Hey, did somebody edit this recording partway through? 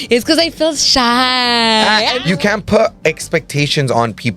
yes; 1 cut; at 2.2 s

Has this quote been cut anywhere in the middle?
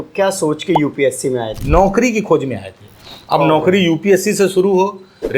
yes; 1 cut; at 1.6 s

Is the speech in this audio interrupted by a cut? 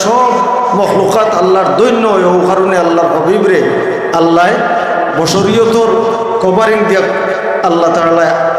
no; 0 cuts

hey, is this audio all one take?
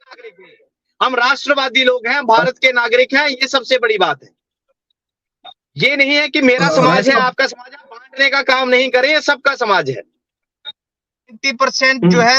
no; 1 cut; at 11.4 s

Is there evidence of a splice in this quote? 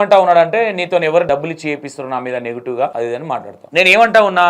yes; 2 cuts; at 1.3 s, 3.2 s

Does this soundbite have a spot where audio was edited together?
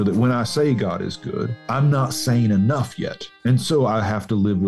yes; 2 cuts; at 1.6 s, 3.4 s

